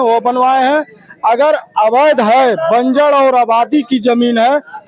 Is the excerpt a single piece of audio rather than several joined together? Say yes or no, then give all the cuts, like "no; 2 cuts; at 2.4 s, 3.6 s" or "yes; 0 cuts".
yes; 0 cuts